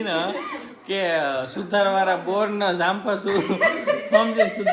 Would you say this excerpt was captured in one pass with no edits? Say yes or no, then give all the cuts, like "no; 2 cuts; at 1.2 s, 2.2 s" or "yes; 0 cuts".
yes; 0 cuts